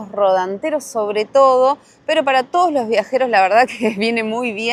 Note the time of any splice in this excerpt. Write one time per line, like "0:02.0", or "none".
none